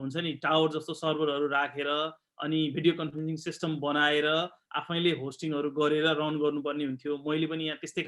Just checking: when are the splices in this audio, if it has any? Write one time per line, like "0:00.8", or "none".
none